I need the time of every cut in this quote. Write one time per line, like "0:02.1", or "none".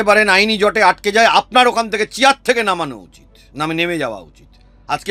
none